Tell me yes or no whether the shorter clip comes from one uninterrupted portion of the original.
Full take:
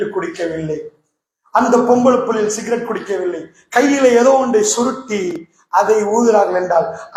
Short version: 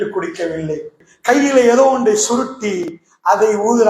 no